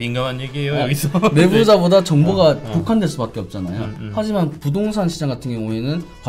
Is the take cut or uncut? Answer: uncut